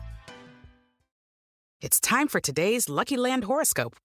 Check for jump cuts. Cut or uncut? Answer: cut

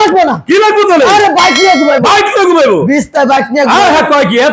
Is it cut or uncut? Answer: uncut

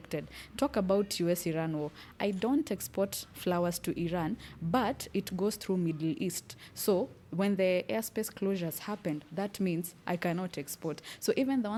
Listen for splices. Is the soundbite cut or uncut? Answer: uncut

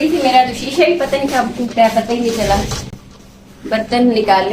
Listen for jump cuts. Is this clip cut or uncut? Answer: uncut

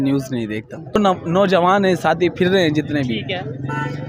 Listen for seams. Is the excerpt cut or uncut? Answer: cut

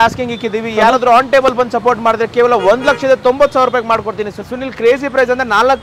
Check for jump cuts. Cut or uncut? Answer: cut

